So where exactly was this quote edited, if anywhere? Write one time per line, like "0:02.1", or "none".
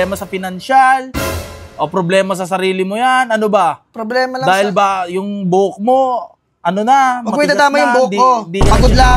none